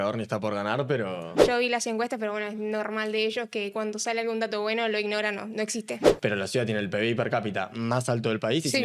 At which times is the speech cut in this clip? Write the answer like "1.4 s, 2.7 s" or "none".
1.4 s, 6.0 s

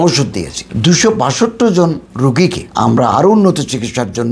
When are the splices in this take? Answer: none

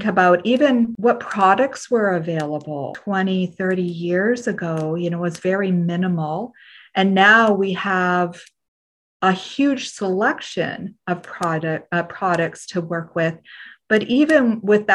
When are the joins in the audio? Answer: 0.9 s, 3.0 s

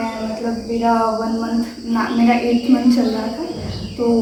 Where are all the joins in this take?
none

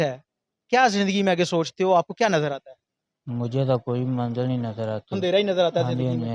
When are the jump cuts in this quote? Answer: none

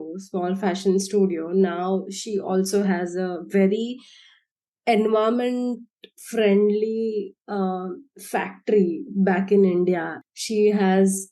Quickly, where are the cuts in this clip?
none

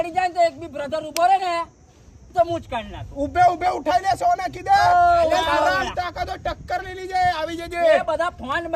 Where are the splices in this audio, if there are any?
none

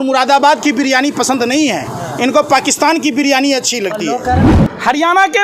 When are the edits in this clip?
4.6 s

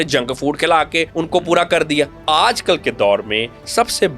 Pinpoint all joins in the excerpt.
1.1 s, 2.2 s

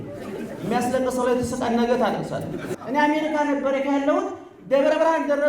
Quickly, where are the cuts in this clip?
2.7 s

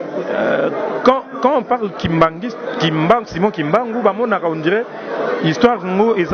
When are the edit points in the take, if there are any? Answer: none

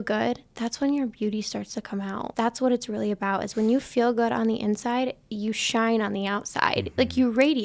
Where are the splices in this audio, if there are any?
2.3 s

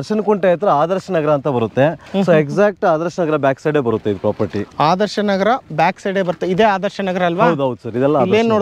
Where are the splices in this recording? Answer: none

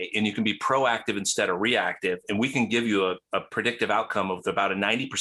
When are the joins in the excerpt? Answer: none

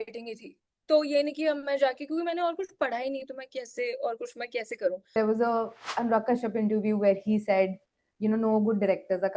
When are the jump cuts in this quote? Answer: 5.1 s

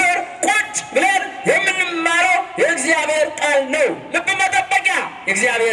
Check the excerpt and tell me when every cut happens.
none

